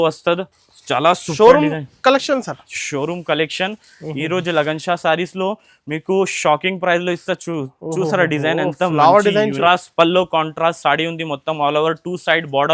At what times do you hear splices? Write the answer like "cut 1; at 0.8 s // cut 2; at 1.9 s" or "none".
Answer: cut 1; at 9.6 s